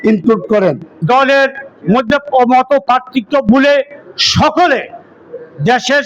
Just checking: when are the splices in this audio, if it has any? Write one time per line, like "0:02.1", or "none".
0:00.9
0:01.7

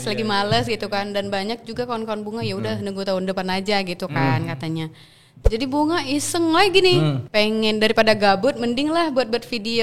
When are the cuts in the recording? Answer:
0:05.3
0:07.2

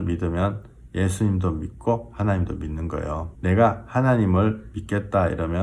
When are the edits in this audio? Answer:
0:03.3

